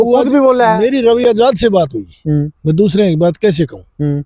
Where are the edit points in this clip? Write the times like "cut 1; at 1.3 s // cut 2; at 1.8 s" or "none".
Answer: none